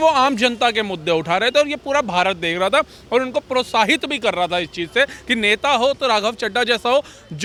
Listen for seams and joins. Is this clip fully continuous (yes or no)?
yes